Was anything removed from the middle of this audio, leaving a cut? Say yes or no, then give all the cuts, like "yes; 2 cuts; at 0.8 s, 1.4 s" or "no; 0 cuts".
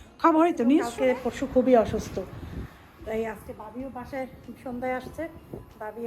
yes; 1 cut; at 0.9 s